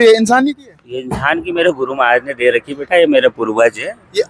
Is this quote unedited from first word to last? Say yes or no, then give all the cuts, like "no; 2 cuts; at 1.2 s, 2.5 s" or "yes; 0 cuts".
yes; 0 cuts